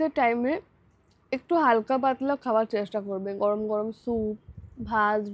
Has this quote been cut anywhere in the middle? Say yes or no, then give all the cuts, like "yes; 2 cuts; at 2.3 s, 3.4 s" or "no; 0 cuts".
no; 0 cuts